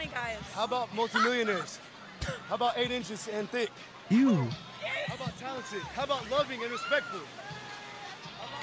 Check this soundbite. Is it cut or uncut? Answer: uncut